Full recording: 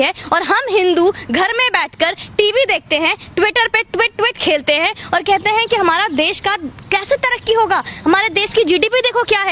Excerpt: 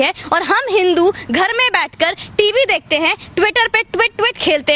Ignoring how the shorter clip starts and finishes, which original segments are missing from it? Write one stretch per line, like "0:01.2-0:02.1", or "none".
none

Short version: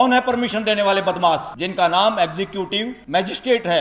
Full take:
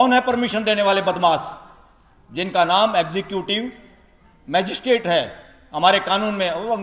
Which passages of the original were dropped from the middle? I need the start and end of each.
0:01.6-0:02.3
0:03.7-0:04.4

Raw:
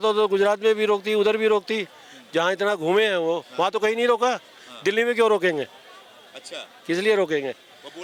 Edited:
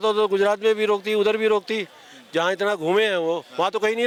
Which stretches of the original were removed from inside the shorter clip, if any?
none

